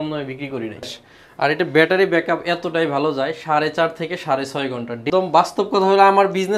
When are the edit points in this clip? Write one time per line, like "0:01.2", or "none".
0:00.9
0:05.1